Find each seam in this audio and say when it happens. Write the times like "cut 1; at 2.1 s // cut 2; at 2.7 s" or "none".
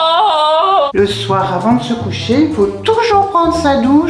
cut 1; at 0.9 s